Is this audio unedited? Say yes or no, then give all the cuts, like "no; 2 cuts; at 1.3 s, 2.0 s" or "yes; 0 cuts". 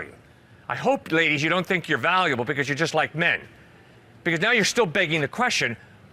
yes; 0 cuts